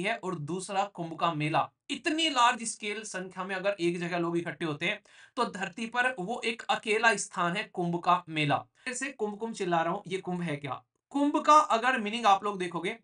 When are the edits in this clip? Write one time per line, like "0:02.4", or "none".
0:08.9